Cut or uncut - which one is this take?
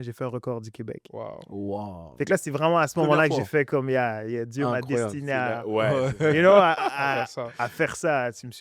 uncut